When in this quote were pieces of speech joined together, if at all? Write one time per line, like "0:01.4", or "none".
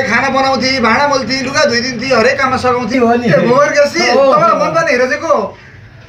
0:02.9